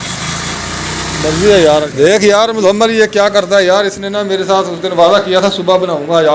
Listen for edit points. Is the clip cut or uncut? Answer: cut